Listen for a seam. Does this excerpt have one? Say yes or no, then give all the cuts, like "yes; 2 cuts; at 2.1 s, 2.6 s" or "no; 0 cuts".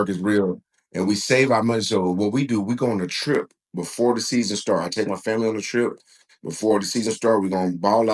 no; 0 cuts